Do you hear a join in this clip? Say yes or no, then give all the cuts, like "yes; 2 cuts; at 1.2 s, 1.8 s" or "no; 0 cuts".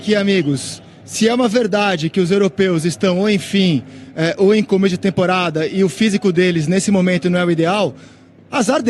no; 0 cuts